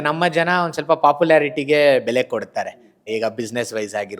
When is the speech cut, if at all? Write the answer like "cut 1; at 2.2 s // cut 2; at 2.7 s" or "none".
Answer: cut 1; at 3.0 s